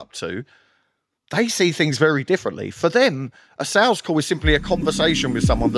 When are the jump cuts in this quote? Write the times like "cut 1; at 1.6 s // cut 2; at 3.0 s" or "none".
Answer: none